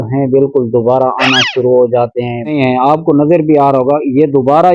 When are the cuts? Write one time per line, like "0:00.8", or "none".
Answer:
0:02.5